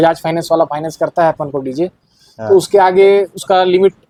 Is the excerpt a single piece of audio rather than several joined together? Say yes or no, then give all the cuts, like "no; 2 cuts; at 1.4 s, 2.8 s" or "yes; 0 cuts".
yes; 0 cuts